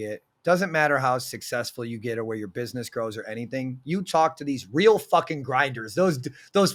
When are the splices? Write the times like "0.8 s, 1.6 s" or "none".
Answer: none